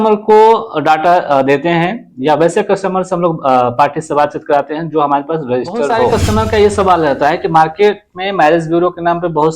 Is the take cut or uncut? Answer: cut